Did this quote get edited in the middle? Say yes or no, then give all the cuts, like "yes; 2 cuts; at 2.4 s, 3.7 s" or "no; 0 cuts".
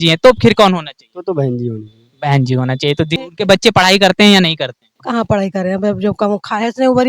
yes; 1 cut; at 3.2 s